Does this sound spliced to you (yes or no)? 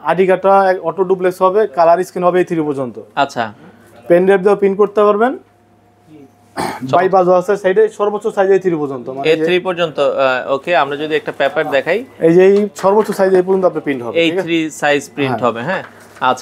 no